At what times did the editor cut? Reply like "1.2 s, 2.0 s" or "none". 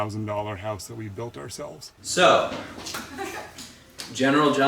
2.0 s